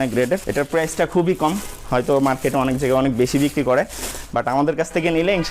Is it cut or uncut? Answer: uncut